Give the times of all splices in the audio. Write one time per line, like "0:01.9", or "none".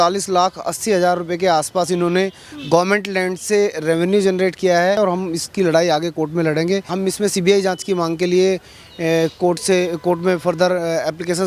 0:05.0
0:06.9

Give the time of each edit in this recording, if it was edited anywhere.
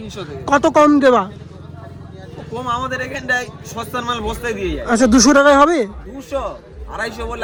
none

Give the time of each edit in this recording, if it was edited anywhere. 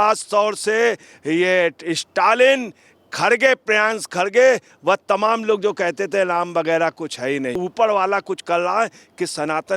0:07.6

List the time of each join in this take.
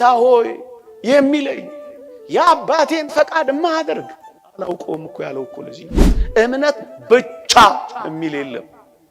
0:06.2

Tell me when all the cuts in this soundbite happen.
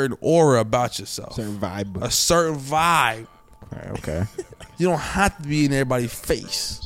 none

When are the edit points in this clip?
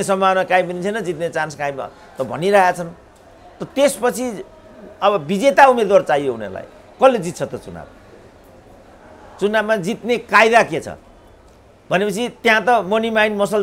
none

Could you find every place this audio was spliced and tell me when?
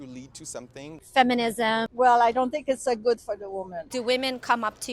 0:01.0
0:01.9
0:03.8

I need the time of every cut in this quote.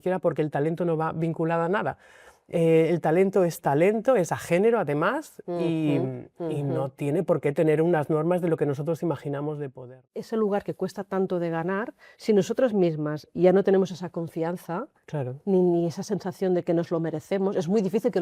0:10.1

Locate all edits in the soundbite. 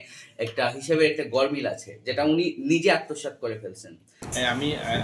0:04.1

